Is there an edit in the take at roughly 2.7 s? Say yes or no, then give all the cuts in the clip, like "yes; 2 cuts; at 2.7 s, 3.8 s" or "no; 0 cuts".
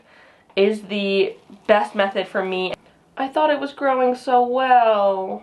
yes; 1 cut; at 2.7 s